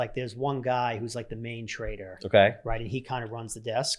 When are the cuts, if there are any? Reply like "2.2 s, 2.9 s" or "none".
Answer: none

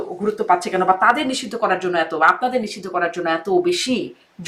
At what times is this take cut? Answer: none

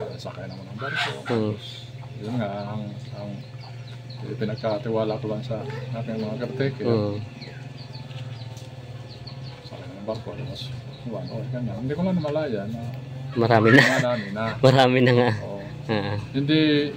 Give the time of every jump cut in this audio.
none

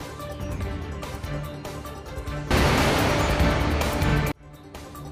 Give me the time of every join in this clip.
none

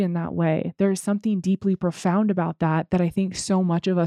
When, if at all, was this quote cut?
none

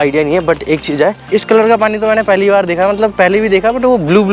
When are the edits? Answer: 1.2 s

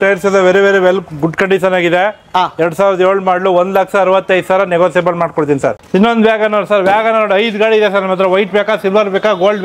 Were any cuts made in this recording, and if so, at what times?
5.8 s

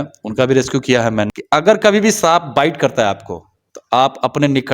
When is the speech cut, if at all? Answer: 1.4 s

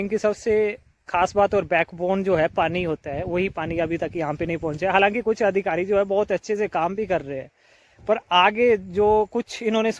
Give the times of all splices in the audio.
none

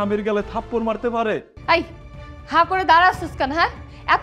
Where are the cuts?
1.5 s

